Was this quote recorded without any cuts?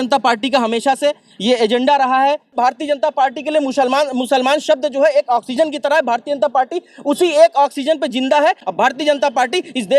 no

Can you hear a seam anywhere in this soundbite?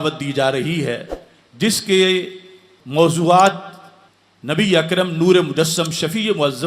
no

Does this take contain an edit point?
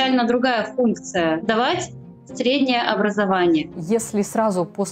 yes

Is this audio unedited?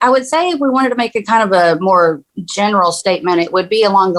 yes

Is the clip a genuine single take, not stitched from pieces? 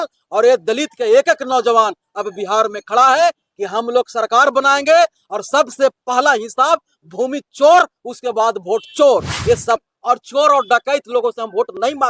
no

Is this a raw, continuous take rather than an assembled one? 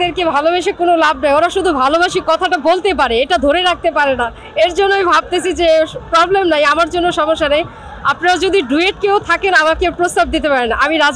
yes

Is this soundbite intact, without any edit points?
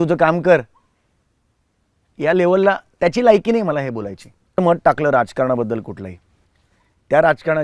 no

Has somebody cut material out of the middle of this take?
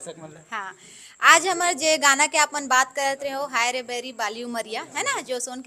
no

